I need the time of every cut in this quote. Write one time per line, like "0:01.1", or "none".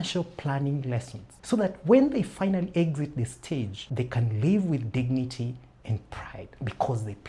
none